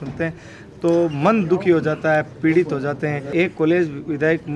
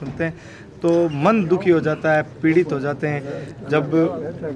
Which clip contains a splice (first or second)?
first